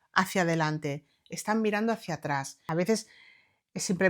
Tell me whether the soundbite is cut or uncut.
cut